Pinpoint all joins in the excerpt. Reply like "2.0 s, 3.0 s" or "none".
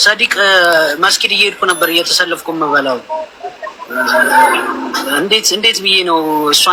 none